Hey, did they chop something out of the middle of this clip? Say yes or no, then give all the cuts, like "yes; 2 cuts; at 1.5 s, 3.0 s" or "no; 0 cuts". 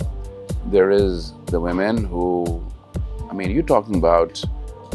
no; 0 cuts